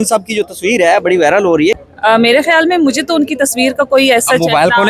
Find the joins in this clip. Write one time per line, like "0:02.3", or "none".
0:01.8